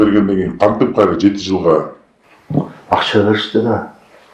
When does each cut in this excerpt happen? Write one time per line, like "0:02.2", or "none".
none